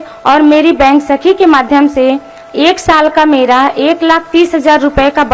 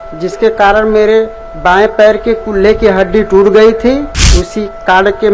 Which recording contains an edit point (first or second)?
second